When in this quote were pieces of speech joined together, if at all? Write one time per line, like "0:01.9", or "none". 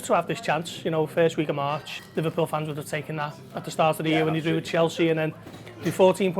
0:02.0